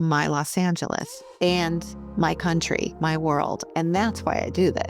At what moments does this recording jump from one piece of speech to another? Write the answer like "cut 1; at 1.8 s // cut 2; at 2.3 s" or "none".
cut 1; at 2.0 s // cut 2; at 3.6 s